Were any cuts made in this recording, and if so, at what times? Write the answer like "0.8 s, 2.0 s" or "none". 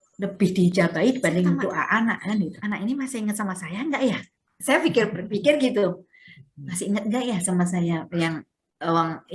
2.6 s